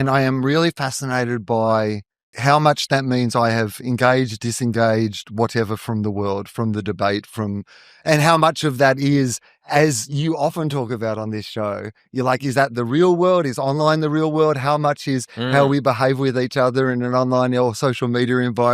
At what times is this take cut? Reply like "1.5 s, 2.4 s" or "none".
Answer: 2.4 s